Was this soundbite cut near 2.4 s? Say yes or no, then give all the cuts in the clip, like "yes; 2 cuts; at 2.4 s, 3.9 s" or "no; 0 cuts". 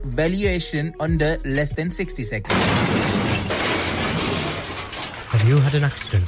yes; 1 cut; at 2.4 s